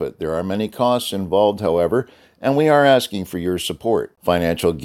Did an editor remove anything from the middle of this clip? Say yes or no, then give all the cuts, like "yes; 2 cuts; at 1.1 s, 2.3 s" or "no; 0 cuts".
no; 0 cuts